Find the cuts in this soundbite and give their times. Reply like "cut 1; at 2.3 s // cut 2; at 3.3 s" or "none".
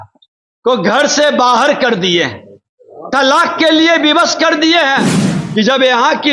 cut 1; at 5.4 s